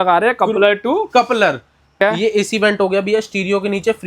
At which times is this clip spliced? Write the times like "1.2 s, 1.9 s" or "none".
2.0 s